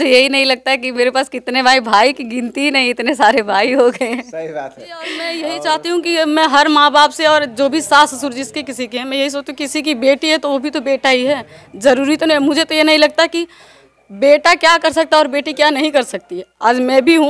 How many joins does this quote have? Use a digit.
1